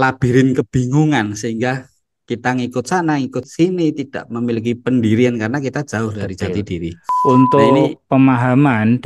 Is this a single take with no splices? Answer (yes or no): no